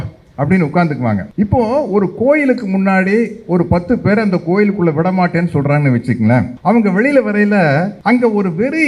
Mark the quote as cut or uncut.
cut